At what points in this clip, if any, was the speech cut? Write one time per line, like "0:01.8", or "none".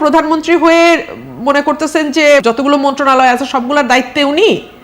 0:02.4